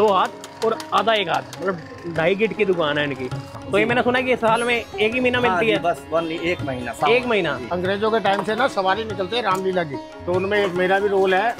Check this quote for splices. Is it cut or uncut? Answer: cut